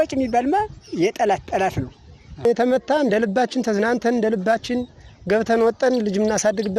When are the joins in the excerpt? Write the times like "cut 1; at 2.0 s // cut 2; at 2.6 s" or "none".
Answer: cut 1; at 2.4 s